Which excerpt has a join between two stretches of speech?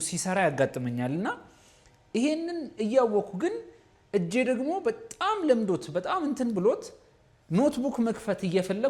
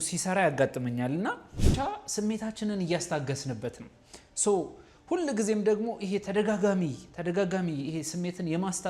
second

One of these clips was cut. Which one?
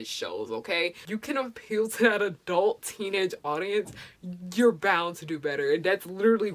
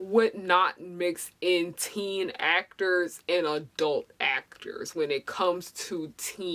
first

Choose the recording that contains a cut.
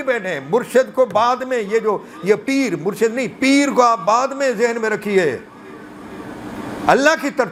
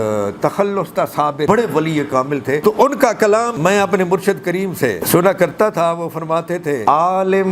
second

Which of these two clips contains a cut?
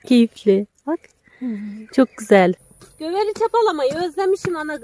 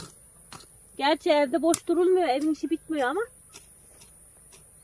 first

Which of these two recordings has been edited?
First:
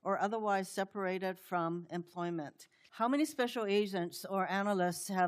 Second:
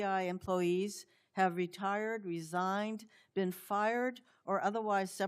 first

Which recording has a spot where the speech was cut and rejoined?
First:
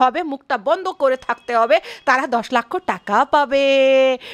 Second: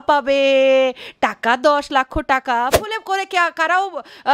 second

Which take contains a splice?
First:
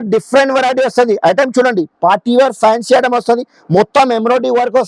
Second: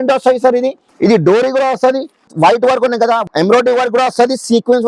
second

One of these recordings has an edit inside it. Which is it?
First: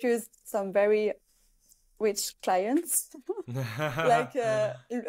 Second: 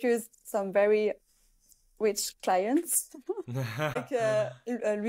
second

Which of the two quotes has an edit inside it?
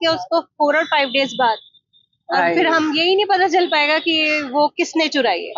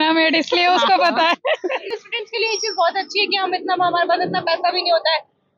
second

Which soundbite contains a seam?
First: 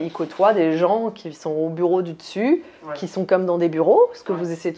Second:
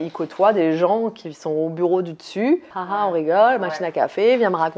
second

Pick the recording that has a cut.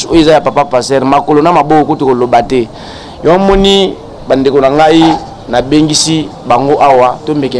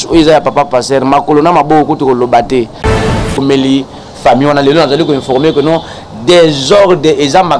second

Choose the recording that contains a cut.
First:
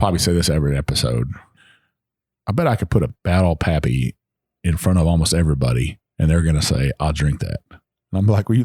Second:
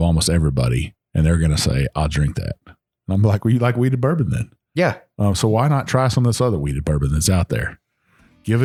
first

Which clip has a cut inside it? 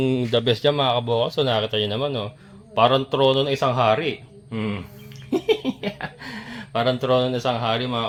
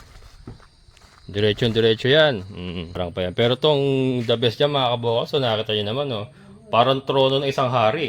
second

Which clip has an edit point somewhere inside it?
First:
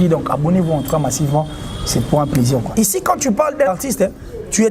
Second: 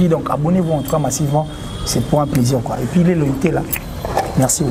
first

